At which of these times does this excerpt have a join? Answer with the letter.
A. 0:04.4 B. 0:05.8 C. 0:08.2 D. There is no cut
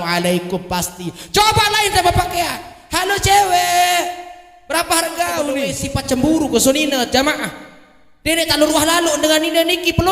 B